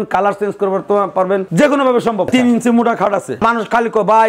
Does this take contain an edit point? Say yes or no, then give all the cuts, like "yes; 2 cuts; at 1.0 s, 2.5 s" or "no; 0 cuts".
yes; 2 cuts; at 2.3 s, 3.4 s